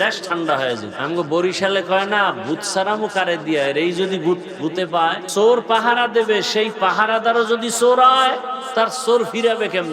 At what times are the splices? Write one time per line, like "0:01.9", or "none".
0:00.9
0:05.2
0:08.6